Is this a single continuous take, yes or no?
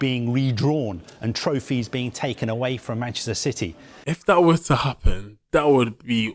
no